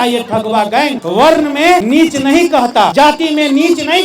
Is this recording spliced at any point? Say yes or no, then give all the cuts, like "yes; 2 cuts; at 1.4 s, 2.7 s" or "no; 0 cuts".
yes; 3 cuts; at 1.0 s, 1.8 s, 2.9 s